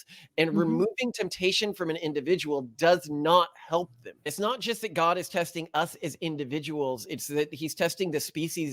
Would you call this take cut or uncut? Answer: cut